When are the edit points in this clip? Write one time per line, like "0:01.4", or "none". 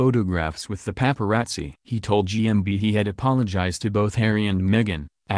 0:01.8